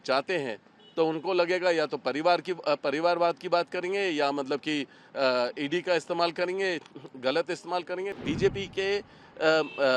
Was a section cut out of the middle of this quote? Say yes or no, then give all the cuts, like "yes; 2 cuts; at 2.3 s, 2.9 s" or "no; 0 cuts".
yes; 1 cut; at 8.1 s